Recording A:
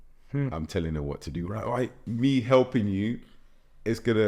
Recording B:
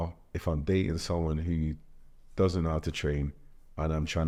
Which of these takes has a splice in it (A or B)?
A